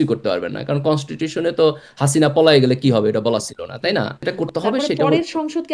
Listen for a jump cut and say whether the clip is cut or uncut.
cut